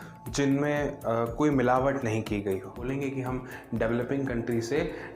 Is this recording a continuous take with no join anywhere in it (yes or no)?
no